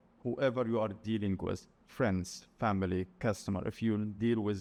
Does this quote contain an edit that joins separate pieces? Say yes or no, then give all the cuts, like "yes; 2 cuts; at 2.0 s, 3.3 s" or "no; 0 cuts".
no; 0 cuts